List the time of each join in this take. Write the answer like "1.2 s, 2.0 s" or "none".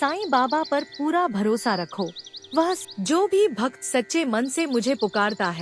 2.8 s

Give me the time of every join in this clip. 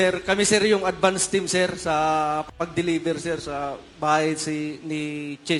none

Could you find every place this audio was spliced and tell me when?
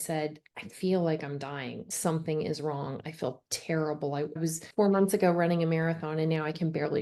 none

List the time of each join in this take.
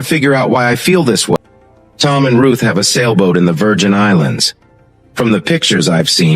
1.4 s

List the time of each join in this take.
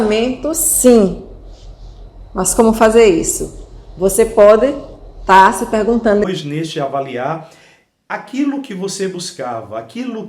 6.2 s

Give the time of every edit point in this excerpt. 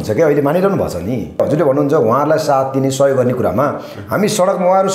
1.4 s

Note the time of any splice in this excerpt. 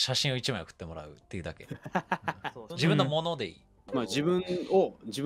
none

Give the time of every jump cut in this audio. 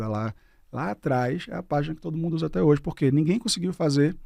none

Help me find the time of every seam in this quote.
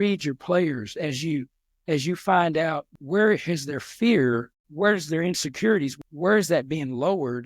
2.9 s, 4.6 s, 5.9 s

